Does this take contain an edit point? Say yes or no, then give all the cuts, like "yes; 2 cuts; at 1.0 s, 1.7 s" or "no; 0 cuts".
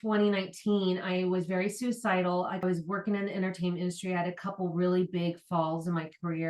no; 0 cuts